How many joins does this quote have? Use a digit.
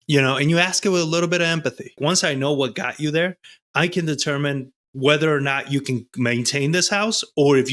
1